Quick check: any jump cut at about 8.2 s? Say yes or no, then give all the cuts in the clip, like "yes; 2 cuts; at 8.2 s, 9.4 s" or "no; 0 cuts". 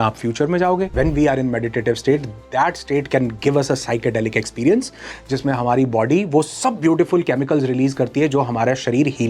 no; 1 cut; at 0.9 s